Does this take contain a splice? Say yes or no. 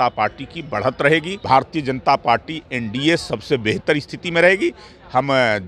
yes